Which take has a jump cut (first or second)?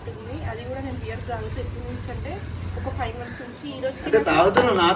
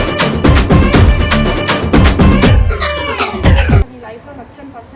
second